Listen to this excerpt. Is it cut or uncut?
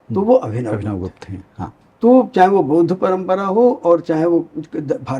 cut